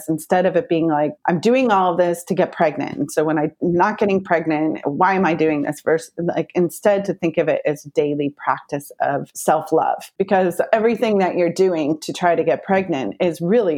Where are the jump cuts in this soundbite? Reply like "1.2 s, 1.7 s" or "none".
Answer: 1.1 s, 9.3 s, 10.1 s